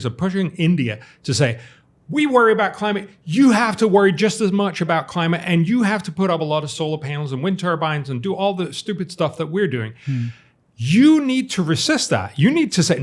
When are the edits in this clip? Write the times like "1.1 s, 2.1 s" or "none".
none